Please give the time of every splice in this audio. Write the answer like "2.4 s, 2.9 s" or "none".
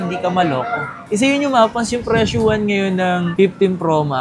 1.0 s